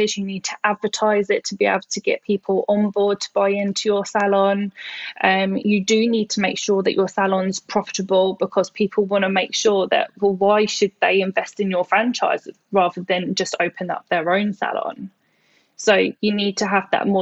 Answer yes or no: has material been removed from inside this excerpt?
no